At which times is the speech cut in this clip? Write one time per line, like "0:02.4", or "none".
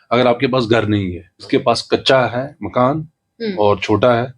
0:01.4